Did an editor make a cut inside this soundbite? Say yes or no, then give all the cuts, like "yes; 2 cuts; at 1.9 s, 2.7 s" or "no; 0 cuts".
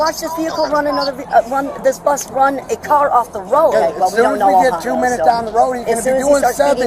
yes; 1 cut; at 3.7 s